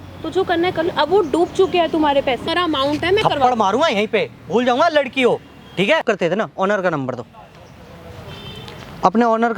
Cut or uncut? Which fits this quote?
cut